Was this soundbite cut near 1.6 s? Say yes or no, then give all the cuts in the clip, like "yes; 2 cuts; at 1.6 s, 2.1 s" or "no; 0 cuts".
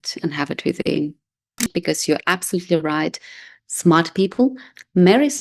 yes; 1 cut; at 1.6 s